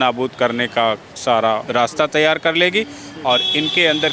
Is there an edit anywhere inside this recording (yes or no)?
yes